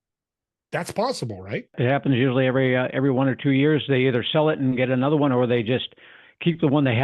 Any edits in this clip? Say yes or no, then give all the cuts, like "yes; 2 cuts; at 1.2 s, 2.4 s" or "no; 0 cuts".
yes; 1 cut; at 1.8 s